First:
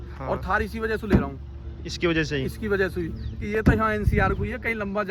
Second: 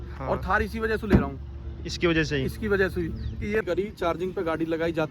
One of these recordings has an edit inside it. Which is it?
second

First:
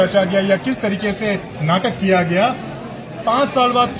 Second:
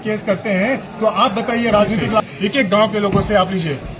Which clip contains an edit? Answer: second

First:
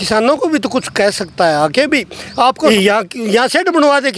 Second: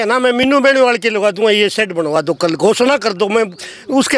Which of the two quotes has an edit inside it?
first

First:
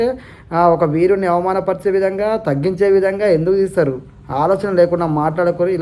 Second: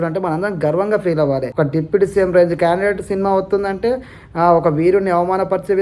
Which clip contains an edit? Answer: second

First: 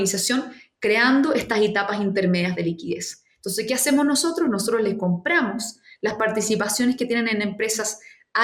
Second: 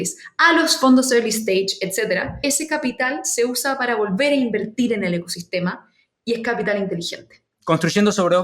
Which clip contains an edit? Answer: second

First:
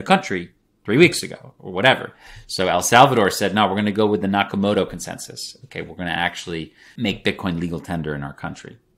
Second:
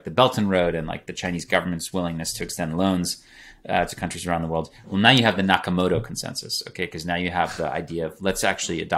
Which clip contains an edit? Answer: first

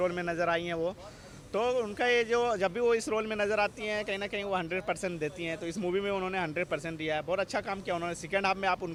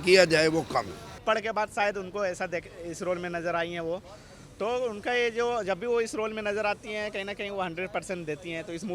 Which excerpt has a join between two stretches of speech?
second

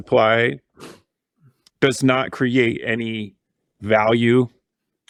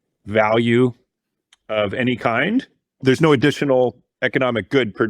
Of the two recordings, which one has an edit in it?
second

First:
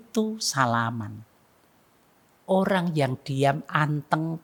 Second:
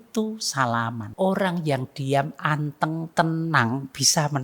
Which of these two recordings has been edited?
second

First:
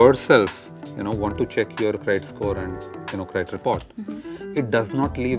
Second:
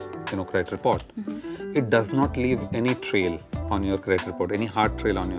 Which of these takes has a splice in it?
second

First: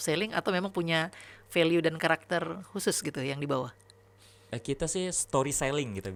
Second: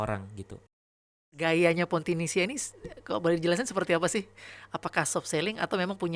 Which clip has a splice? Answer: second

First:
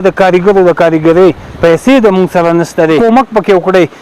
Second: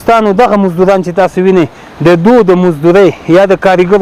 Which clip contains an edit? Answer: first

